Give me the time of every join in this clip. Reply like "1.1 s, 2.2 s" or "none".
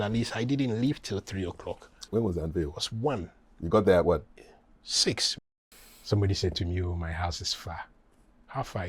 2.1 s, 5.3 s